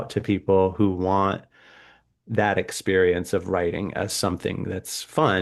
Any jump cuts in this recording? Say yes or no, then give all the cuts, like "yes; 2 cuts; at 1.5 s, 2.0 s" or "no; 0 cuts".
no; 0 cuts